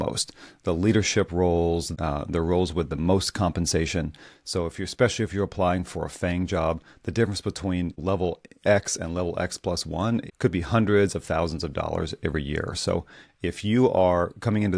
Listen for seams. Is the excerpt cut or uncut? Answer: cut